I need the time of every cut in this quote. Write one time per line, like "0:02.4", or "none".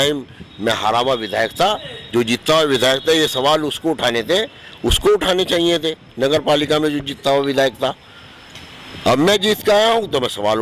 none